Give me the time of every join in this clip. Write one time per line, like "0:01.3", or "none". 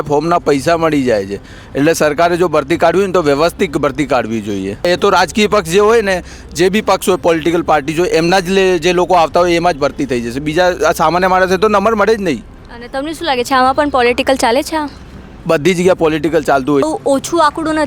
0:04.9
0:16.8